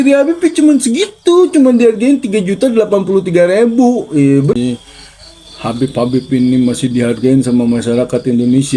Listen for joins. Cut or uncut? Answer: cut